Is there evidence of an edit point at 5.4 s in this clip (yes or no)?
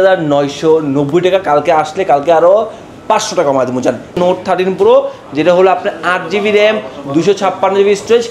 no